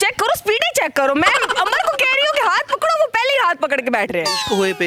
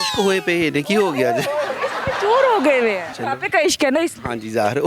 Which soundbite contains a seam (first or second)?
second